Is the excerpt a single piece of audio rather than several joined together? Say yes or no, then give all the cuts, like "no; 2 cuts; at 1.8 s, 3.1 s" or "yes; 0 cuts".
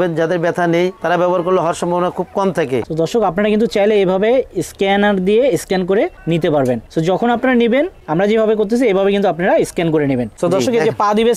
no; 5 cuts; at 2.9 s, 6.2 s, 6.8 s, 8.0 s, 10.3 s